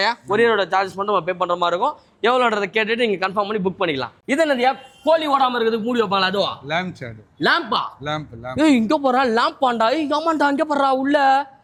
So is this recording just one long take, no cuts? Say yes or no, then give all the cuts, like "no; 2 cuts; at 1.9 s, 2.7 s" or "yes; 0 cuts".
yes; 0 cuts